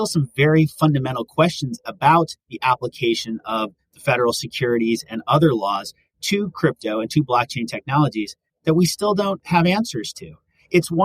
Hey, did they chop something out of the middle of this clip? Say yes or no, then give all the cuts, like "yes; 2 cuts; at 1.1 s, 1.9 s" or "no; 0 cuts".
yes; 1 cut; at 9.4 s